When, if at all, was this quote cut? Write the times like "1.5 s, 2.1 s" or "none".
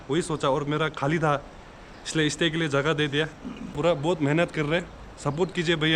3.8 s